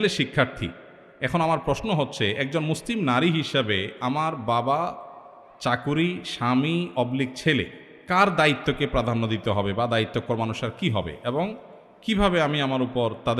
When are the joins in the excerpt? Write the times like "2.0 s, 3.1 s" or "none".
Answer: none